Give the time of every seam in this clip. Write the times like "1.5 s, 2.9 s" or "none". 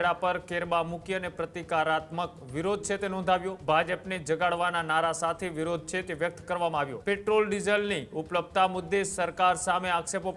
3.6 s, 7.0 s